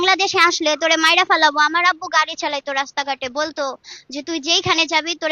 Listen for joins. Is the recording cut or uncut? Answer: uncut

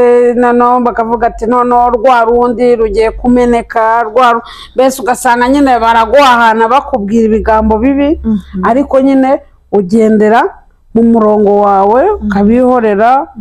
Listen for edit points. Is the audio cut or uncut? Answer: uncut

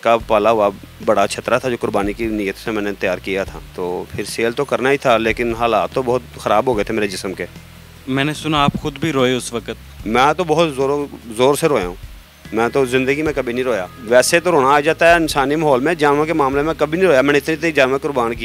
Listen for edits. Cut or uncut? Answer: uncut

